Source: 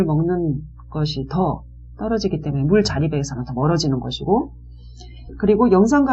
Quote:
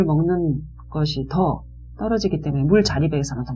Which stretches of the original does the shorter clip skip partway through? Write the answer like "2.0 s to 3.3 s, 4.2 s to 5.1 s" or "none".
none